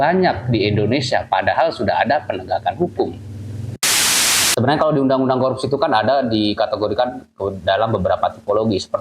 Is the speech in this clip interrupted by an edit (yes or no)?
yes